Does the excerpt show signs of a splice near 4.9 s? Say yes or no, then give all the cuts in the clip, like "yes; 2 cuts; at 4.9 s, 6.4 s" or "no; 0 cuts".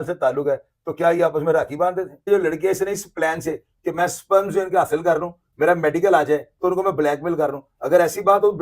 no; 1 cut; at 2.3 s